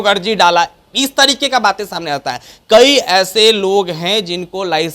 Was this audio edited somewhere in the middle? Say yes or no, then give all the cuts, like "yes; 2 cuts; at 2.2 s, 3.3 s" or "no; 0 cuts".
no; 0 cuts